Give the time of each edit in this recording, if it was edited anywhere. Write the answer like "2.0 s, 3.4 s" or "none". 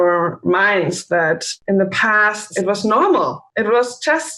1.5 s, 2.5 s, 3.4 s